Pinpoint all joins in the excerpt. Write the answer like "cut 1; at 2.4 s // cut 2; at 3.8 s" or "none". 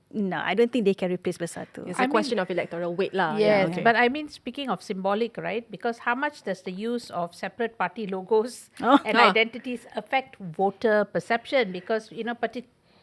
none